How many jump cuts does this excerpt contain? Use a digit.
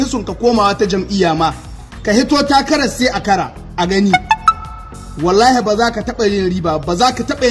0